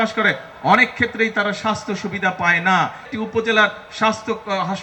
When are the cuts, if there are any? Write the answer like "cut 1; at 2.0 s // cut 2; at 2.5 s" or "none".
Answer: cut 1; at 3.1 s